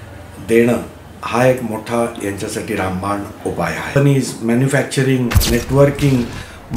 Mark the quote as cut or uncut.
cut